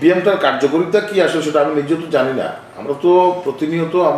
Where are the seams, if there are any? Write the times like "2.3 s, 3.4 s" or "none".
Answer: none